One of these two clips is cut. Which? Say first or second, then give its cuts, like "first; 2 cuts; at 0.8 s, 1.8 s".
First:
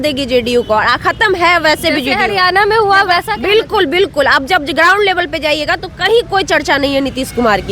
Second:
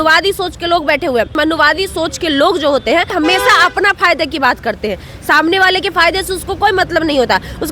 second; 2 cuts; at 1.3 s, 3.1 s